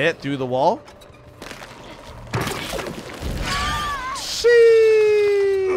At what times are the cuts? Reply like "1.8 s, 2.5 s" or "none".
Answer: 1.4 s